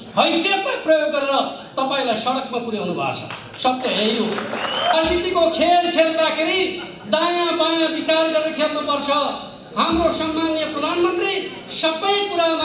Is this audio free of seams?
no; 1 cut; at 4.9 s

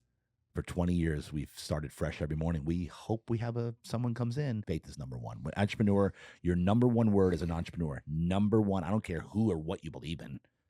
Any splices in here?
yes; 1 cut; at 4.6 s

